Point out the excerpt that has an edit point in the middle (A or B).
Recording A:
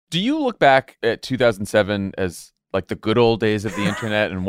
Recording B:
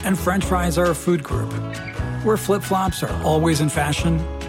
A